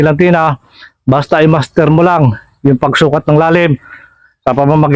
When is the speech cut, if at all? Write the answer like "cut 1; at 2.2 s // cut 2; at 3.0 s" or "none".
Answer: none